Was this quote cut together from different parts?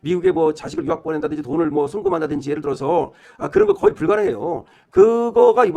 no; 0 cuts

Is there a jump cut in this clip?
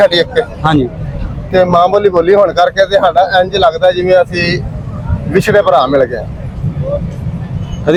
no; 0 cuts

